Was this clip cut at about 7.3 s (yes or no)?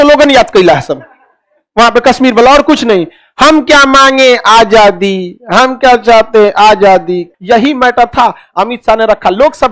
yes